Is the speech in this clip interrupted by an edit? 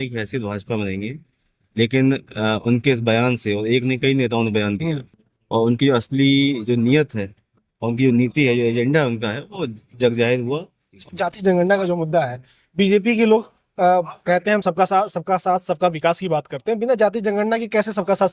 yes; 1 cut; at 10.9 s

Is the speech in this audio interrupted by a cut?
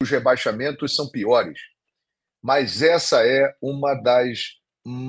no; 0 cuts

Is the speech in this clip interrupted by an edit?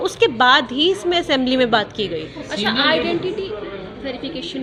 no; 0 cuts

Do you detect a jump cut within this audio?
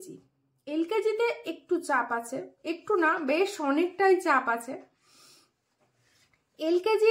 no; 0 cuts

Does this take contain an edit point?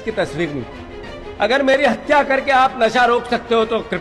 no; 0 cuts

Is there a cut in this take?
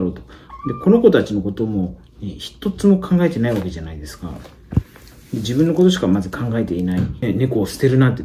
yes; 1 cut; at 7.2 s

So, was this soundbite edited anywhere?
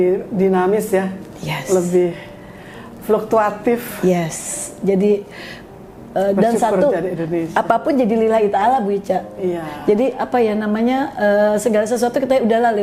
no; 0 cuts

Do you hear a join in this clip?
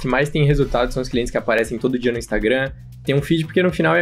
no; 0 cuts

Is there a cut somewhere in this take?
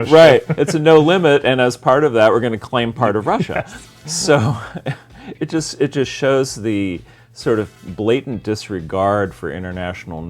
no; 0 cuts

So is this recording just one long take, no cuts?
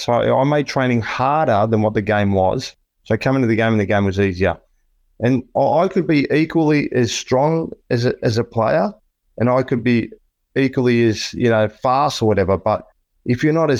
yes; 0 cuts

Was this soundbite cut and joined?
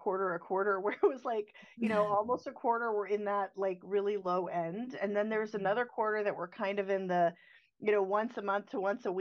no; 0 cuts

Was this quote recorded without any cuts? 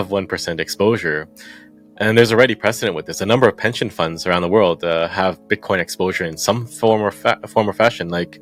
yes; 0 cuts

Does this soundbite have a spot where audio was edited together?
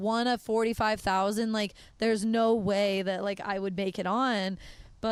no; 0 cuts

